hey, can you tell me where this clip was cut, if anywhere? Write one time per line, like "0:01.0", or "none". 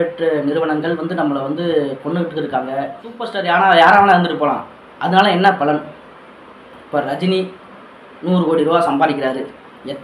0:03.3